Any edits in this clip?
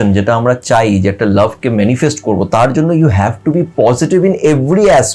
no; 0 cuts

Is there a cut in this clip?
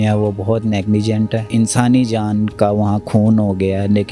yes; 1 cut; at 1.5 s

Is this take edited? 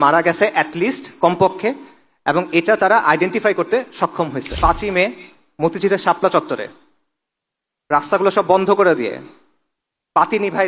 yes; 1 cut; at 4.5 s

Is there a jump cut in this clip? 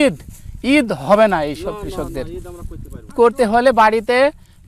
yes; 1 cut; at 3.1 s

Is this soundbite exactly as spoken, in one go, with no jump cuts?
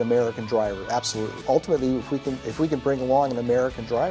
no; 1 cut; at 1.4 s

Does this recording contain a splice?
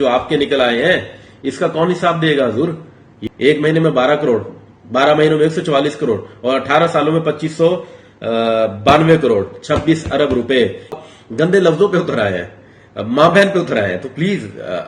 yes; 2 cuts; at 3.2 s, 10.9 s

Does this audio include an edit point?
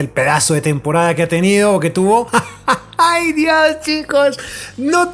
yes; 1 cut; at 2.3 s

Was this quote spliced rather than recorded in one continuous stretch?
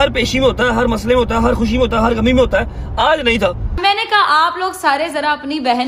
yes; 1 cut; at 3.8 s

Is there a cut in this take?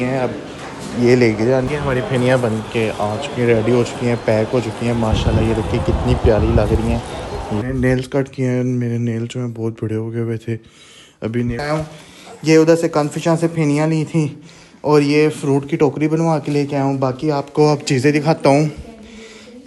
yes; 3 cuts; at 1.7 s, 7.6 s, 11.6 s

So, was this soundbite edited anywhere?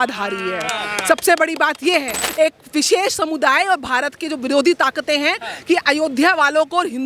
yes; 1 cut; at 2.2 s

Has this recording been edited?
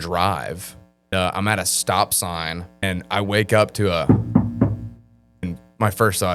yes; 3 cuts; at 1.1 s, 2.8 s, 5.5 s

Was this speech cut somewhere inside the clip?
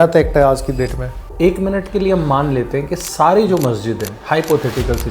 yes; 1 cut; at 1.3 s

